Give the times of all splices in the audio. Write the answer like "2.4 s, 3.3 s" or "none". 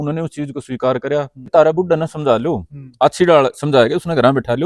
1.5 s

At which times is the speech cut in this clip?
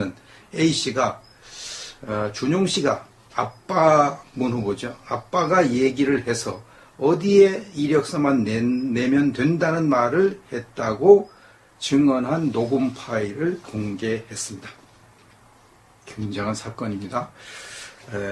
13.3 s

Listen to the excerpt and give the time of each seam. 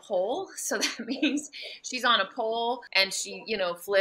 2.9 s

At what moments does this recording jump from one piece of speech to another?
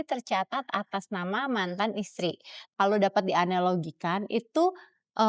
2.6 s

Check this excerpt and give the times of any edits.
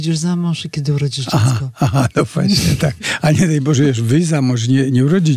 3.1 s

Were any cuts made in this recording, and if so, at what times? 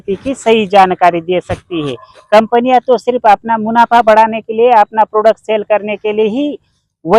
none

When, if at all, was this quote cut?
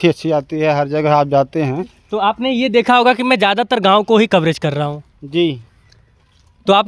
none

